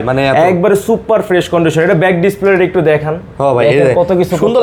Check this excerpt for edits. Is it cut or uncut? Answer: uncut